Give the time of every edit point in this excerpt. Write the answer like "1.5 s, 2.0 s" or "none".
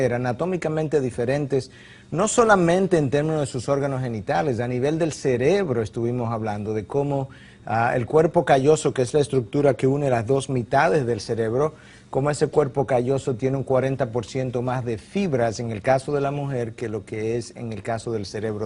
7.5 s